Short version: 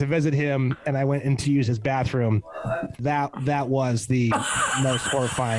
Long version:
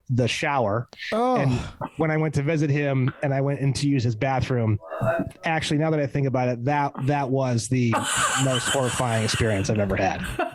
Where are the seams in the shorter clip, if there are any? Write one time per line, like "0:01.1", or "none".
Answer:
0:03.0